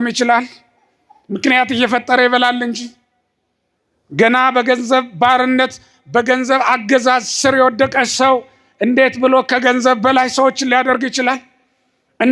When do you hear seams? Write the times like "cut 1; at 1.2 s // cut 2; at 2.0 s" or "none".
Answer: none